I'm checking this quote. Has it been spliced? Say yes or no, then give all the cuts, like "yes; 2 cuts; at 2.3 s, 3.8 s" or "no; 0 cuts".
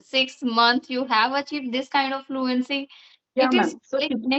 no; 0 cuts